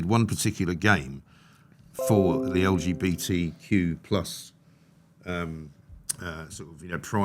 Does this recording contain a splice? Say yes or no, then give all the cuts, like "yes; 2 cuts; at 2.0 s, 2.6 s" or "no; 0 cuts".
no; 0 cuts